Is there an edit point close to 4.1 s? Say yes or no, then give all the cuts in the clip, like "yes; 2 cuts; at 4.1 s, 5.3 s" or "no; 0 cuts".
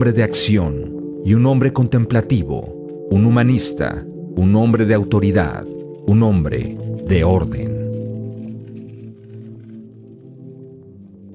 no; 0 cuts